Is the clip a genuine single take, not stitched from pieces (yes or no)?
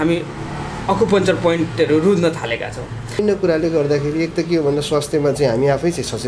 no